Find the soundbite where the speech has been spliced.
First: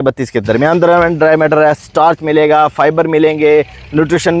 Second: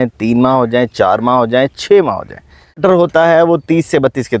second; 1 cut; at 2.8 s

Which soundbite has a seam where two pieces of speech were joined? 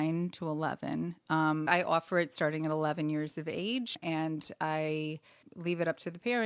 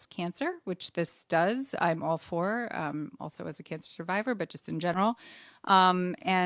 first; 3 cuts; at 1.7 s, 4.0 s, 5.5 s

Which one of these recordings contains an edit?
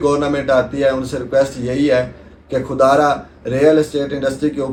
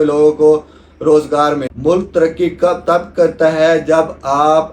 second; 1 cut; at 1.7 s

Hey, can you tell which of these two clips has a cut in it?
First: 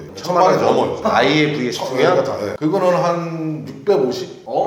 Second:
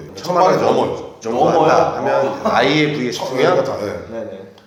first; 2 cuts; at 1.0 s, 2.5 s

